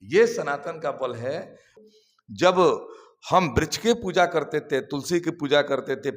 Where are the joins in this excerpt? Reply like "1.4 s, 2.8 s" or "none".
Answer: 1.8 s